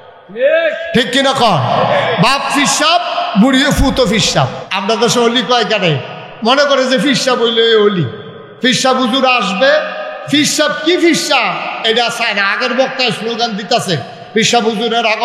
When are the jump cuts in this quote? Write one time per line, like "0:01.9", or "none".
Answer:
0:04.7

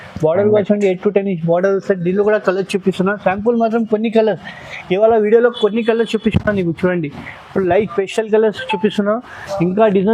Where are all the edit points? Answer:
none

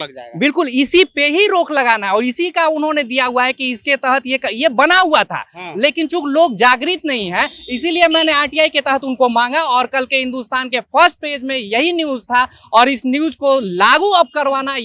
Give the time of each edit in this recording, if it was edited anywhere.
none

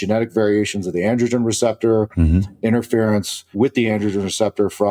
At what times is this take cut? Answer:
0:03.4

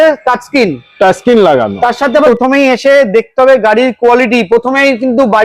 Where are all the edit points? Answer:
0:02.3

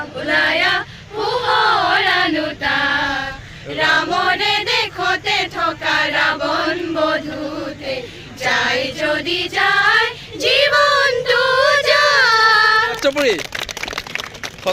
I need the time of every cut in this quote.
0:13.0

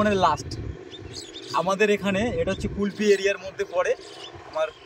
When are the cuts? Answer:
none

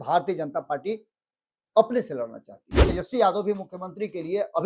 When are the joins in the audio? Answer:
0:02.8

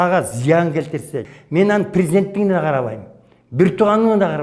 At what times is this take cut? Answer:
0:01.2

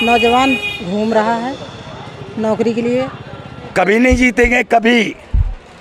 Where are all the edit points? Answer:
0:03.6

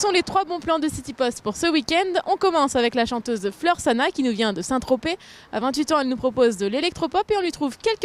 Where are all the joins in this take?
none

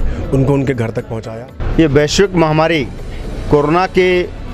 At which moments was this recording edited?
0:01.1

